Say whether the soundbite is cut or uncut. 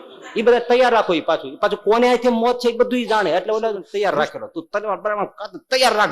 cut